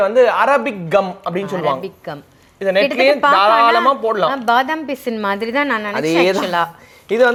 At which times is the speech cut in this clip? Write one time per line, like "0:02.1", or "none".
none